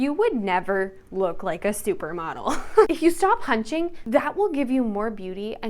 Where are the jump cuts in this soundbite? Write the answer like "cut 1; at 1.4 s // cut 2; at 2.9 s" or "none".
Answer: cut 1; at 2.9 s // cut 2; at 4.0 s